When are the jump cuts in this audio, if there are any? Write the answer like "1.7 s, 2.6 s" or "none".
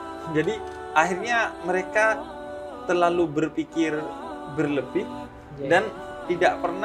none

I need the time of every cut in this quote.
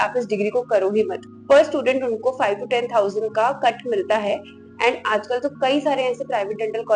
1.3 s

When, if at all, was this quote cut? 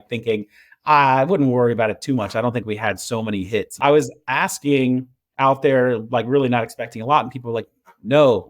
3.7 s

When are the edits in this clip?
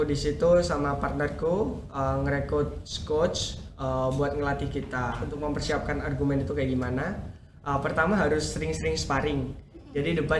5.3 s

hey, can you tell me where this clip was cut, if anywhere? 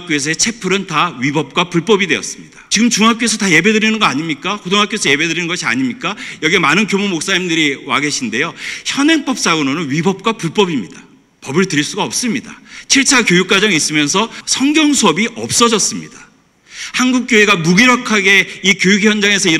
14.4 s

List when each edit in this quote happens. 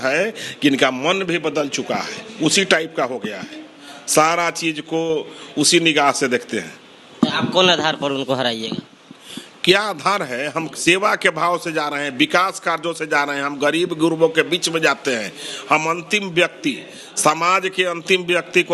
none

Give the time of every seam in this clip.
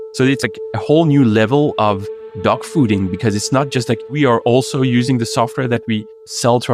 4.1 s

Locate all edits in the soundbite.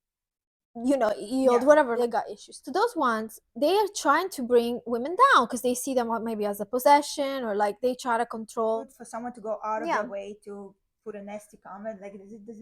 2.1 s, 8.9 s

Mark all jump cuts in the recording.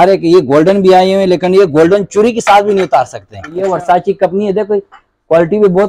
3.6 s

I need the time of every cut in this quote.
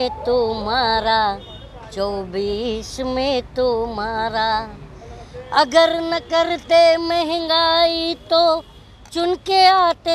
none

